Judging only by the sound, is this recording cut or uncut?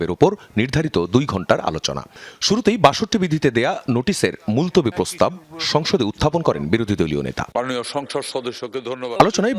cut